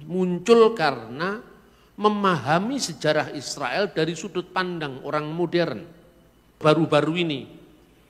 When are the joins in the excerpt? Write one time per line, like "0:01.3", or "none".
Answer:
0:06.6